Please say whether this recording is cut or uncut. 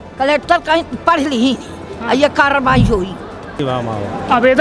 cut